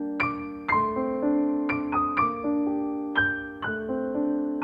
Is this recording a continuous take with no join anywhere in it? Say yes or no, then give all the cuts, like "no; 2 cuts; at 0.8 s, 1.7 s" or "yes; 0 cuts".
yes; 0 cuts